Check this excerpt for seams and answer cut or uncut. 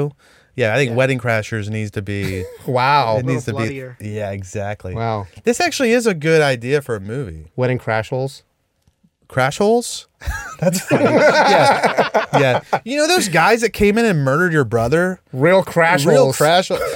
uncut